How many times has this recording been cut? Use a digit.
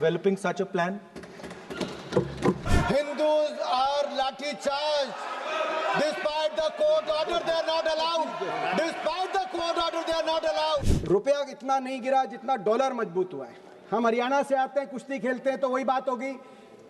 2